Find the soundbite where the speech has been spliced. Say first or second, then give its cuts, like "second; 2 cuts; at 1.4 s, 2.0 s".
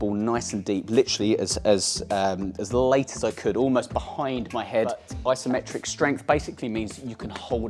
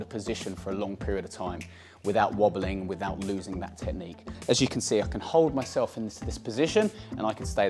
first; 1 cut; at 5.1 s